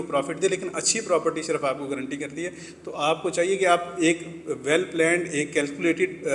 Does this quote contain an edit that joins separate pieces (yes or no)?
no